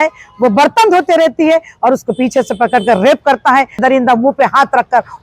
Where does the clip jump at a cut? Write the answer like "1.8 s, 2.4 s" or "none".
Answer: 3.8 s

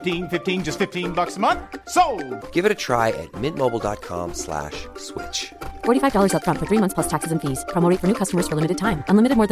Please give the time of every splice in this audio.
none

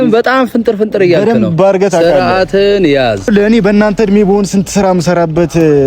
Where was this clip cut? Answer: 3.3 s

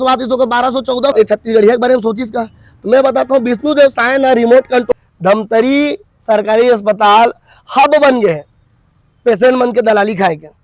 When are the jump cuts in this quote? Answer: 1.1 s, 4.9 s

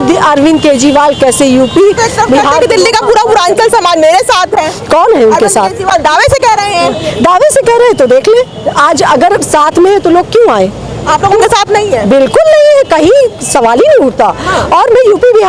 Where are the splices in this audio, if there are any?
none

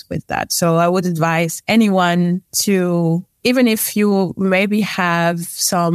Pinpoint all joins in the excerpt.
1.6 s, 2.5 s, 3.3 s

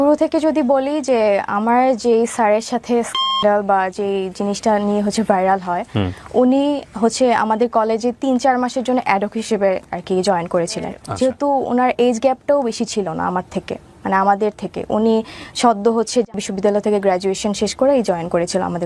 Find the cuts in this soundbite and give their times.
11.0 s, 16.4 s

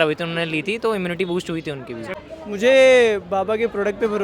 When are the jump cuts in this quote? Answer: 2.2 s

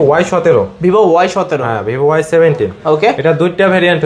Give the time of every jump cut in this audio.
none

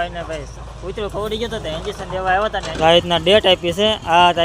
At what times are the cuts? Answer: 2.8 s

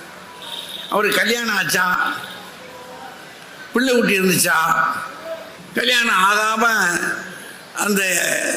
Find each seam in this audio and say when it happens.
5.5 s

